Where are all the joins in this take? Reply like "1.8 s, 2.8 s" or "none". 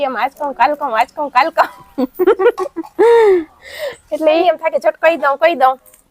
4.4 s

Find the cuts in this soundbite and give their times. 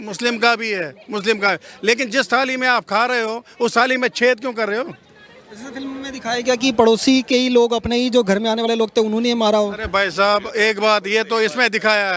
none

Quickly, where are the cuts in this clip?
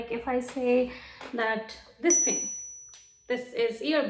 none

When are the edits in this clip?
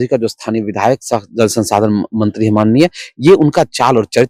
none

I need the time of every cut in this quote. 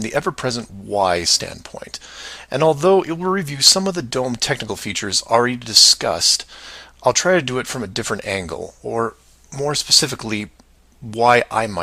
5.5 s

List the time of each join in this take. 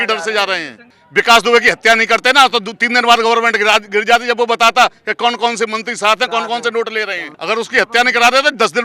1.0 s, 7.3 s

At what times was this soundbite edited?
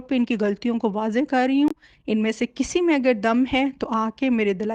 none

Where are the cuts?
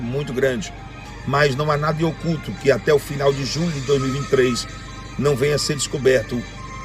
1.1 s

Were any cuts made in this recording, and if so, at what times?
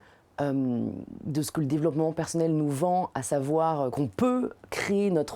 3.9 s

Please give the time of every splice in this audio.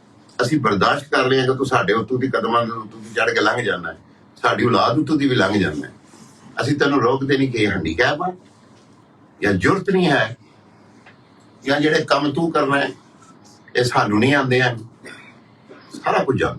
none

